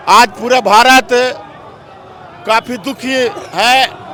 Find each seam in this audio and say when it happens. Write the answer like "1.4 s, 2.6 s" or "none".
none

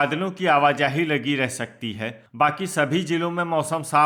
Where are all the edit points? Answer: none

